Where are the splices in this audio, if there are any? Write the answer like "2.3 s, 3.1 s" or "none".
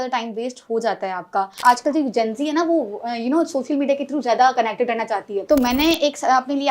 1.6 s, 5.3 s